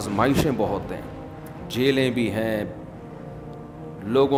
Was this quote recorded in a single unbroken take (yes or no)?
yes